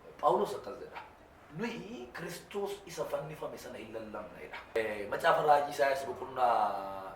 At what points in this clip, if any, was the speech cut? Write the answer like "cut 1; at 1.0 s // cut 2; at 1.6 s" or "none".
cut 1; at 4.8 s